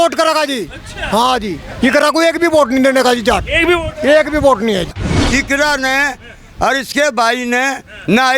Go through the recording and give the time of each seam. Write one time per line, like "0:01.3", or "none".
0:05.0